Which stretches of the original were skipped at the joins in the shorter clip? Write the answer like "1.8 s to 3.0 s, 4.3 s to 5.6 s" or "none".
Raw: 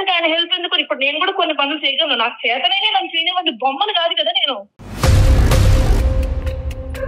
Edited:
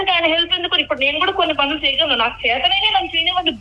none